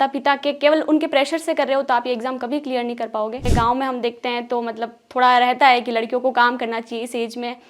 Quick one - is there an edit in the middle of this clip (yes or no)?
yes